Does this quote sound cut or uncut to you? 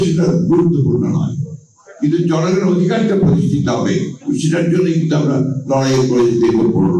uncut